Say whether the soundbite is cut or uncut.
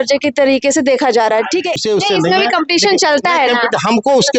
cut